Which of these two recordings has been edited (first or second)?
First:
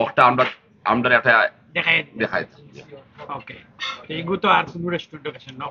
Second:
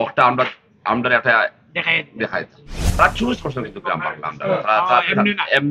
second